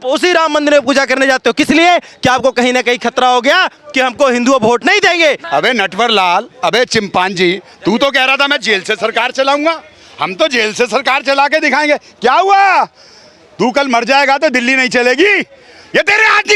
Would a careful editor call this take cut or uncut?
cut